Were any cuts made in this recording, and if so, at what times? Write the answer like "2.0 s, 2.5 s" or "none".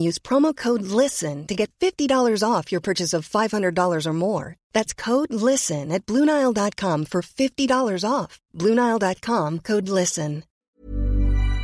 10.5 s